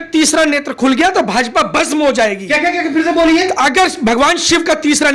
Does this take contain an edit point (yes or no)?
no